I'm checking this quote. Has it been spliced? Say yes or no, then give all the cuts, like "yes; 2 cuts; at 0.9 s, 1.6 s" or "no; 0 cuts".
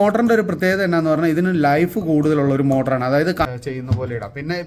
yes; 1 cut; at 3.4 s